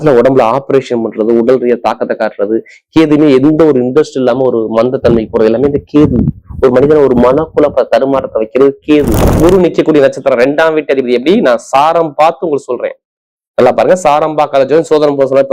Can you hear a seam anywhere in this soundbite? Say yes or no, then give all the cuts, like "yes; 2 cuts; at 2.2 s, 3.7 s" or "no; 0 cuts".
yes; 1 cut; at 9.4 s